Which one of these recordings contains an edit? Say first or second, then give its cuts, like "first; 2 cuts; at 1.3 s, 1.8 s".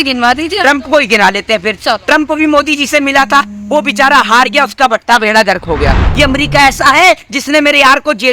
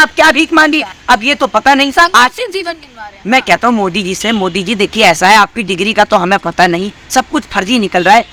first; 1 cut; at 6.0 s